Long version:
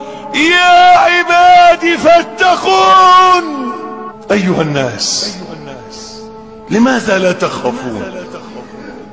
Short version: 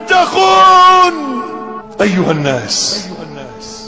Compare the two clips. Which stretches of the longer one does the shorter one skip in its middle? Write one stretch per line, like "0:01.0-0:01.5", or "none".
none